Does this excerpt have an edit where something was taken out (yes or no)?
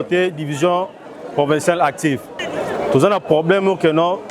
yes